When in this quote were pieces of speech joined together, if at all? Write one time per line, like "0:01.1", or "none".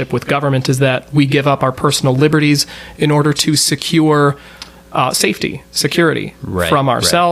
none